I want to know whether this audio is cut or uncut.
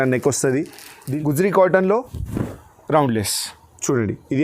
cut